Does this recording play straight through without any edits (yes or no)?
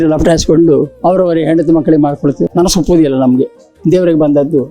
no